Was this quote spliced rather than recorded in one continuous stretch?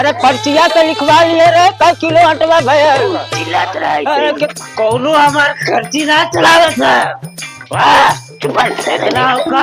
yes; 1 cut; at 4.5 s

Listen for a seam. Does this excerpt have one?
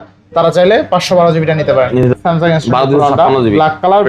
yes; 1 cut; at 2.1 s

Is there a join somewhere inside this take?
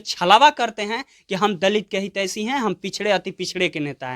no; 0 cuts

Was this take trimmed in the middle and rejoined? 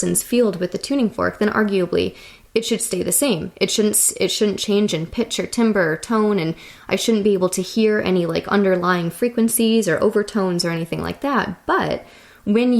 no; 0 cuts

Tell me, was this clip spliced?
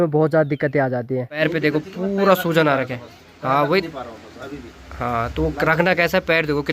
yes; 1 cut; at 1.4 s

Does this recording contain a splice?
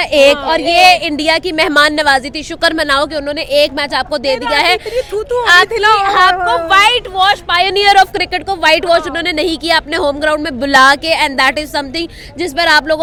no; 0 cuts

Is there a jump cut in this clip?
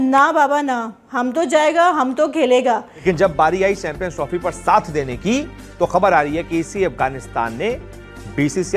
yes; 1 cut; at 3.0 s

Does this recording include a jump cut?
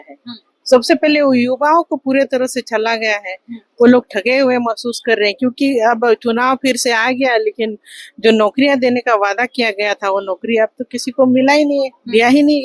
no; 0 cuts

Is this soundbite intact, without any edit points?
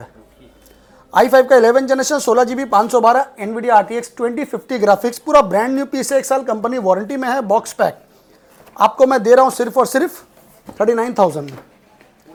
yes; 0 cuts

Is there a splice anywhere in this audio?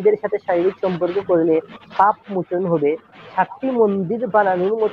no; 0 cuts

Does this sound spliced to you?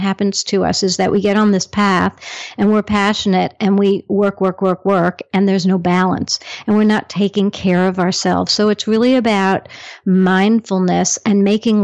no; 0 cuts

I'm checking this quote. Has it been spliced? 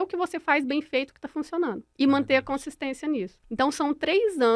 yes; 2 cuts; at 1.8 s, 3.4 s

